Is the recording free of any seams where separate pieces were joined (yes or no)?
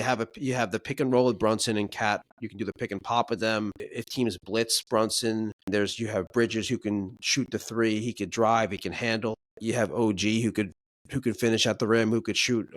no